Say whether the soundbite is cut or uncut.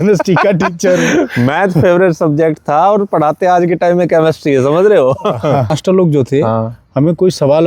cut